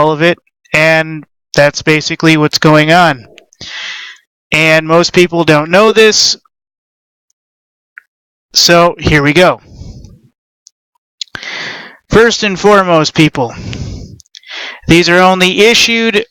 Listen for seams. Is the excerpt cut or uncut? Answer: cut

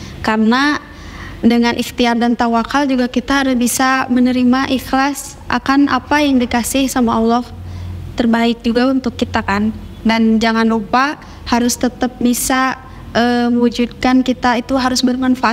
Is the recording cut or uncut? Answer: uncut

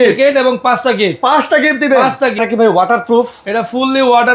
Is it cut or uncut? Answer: cut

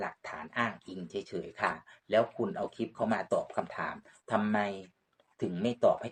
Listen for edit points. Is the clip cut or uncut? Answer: uncut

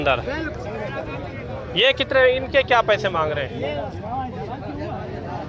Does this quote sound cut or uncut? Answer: uncut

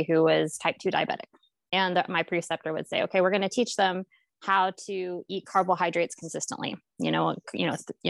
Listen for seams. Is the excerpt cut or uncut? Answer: uncut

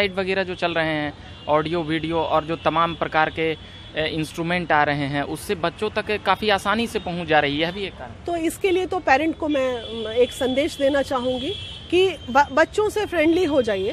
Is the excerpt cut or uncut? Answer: uncut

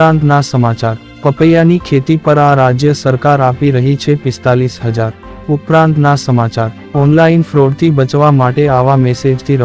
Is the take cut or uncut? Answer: cut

